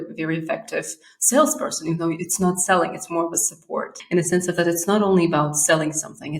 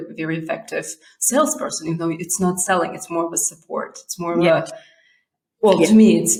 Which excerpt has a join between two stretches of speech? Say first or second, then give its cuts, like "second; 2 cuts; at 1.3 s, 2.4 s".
first; 1 cut; at 3.9 s